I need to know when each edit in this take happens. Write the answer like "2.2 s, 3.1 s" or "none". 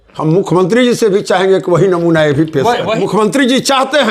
2.9 s